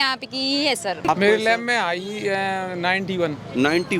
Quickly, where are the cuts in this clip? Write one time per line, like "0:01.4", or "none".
0:01.1